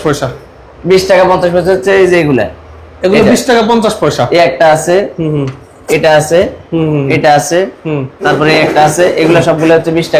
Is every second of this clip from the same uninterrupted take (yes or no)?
yes